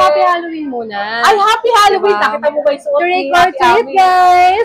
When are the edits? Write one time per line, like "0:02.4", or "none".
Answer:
none